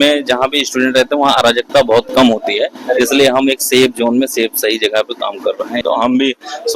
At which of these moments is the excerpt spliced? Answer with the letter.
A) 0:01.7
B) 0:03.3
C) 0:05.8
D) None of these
C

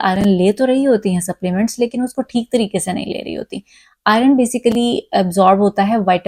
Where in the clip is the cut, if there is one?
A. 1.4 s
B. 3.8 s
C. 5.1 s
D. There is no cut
D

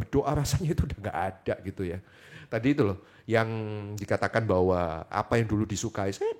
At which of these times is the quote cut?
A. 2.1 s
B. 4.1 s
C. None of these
C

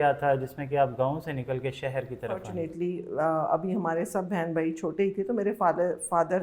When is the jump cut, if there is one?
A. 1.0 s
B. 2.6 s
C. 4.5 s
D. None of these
B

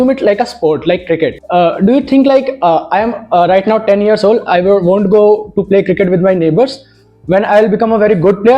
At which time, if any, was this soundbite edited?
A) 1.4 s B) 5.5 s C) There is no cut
A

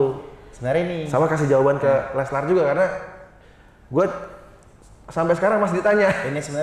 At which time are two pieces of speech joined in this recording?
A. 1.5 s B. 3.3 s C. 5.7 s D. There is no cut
D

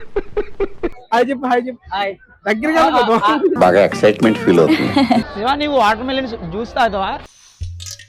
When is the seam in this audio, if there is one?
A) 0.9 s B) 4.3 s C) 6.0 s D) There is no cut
D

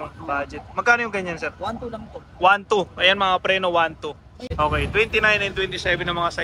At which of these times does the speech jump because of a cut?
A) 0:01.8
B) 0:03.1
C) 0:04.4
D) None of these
C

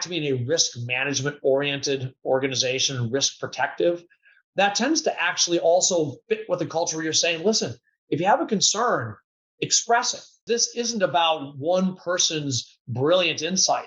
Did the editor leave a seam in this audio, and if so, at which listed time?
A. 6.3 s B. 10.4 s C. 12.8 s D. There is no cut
B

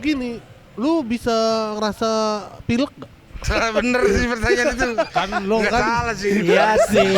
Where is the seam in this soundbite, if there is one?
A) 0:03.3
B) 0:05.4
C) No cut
A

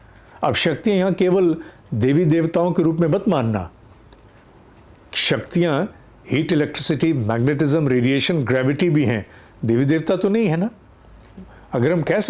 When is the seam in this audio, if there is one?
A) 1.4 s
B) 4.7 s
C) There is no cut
C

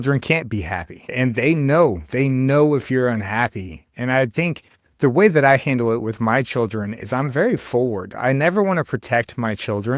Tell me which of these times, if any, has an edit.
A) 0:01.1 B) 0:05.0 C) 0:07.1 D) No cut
A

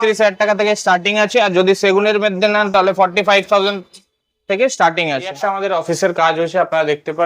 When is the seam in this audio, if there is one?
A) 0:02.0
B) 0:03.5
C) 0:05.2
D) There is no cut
C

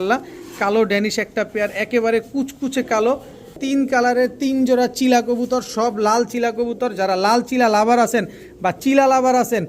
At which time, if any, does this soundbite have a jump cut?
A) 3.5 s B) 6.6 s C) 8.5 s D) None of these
A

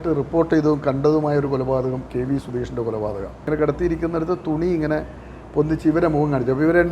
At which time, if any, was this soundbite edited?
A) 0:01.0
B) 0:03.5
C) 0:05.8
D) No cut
B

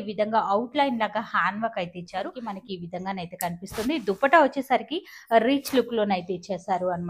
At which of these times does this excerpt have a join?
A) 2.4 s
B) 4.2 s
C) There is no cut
A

